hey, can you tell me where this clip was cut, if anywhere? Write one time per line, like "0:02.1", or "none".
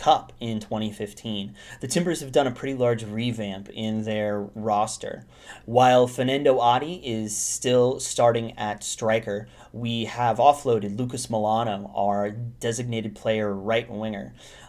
0:13.1